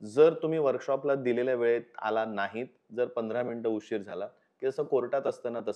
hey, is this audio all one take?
yes; 0 cuts

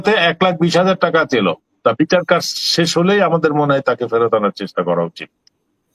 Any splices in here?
yes; 1 cut; at 1.7 s

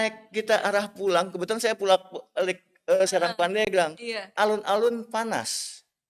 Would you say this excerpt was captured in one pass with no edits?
yes; 0 cuts

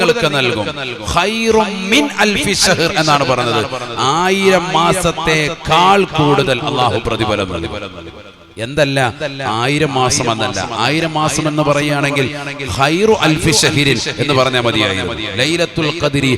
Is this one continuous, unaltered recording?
yes; 0 cuts

